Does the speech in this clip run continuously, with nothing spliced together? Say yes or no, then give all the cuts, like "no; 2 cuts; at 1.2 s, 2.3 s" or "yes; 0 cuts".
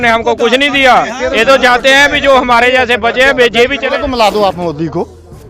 no; 1 cut; at 3.8 s